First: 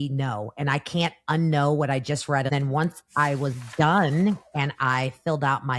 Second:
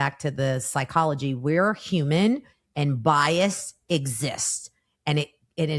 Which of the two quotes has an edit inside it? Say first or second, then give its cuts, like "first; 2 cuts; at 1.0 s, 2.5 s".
first; 1 cut; at 2.5 s